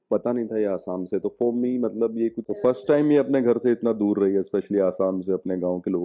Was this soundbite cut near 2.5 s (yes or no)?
yes